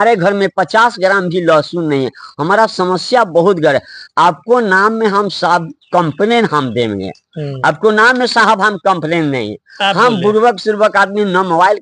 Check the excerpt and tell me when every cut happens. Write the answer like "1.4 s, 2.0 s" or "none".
none

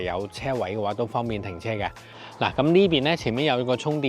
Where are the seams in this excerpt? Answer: 2.1 s

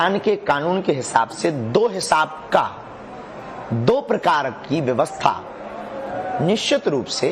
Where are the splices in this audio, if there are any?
none

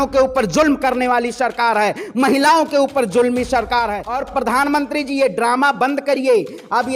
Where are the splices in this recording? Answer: 4.1 s

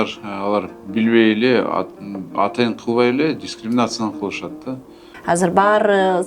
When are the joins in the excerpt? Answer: 5.1 s

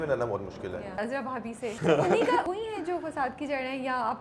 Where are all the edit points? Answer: 1.1 s, 2.4 s

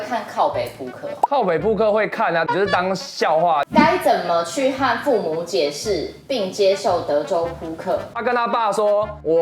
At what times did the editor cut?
3.7 s, 8.1 s

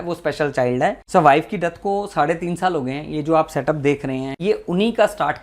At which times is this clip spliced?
1.0 s, 4.3 s

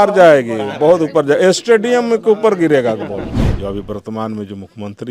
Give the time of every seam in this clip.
3.4 s

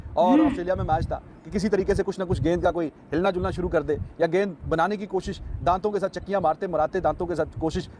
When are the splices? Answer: none

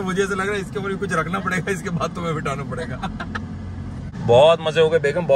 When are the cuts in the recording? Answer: none

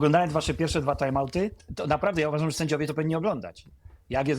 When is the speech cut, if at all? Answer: 1.6 s

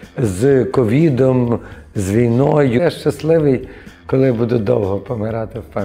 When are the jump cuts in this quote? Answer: 2.8 s

